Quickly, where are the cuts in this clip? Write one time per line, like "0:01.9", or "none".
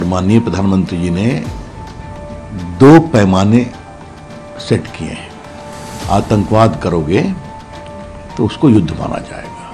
none